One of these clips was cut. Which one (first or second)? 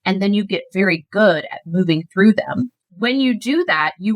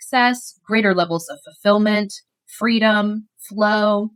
first